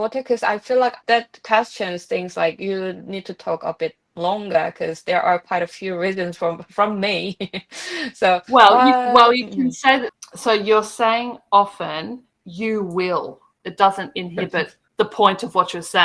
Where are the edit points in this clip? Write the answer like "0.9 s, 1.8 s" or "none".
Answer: 1.0 s, 10.1 s, 13.6 s